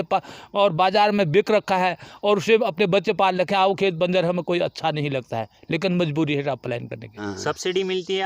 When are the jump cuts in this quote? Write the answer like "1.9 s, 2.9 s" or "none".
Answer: 7.1 s